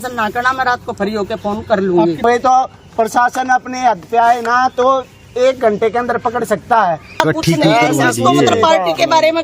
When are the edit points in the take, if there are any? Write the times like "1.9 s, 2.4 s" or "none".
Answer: 2.2 s, 7.2 s